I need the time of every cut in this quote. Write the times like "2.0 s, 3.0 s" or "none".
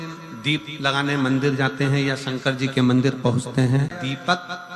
3.6 s

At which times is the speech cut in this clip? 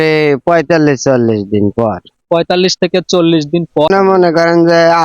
3.9 s

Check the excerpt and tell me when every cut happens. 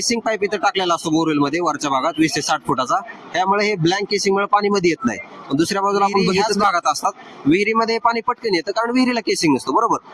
6.5 s

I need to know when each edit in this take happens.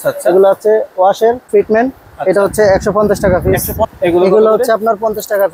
1.4 s, 3.9 s

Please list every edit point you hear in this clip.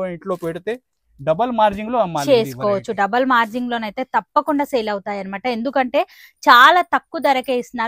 none

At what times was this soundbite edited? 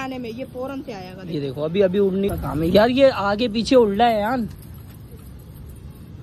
2.3 s

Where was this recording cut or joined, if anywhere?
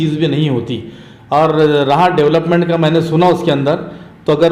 none

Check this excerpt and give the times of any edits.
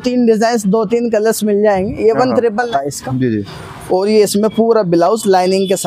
2.7 s

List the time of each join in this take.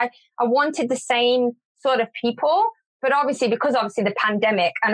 2.9 s

